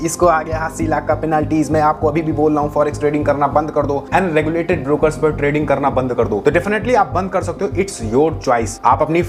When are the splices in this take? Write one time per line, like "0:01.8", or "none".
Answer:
none